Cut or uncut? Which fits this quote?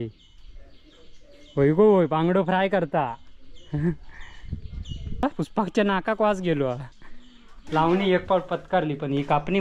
cut